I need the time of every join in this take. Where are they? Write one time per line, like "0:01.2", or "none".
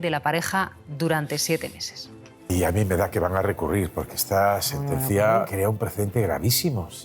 0:02.5
0:05.5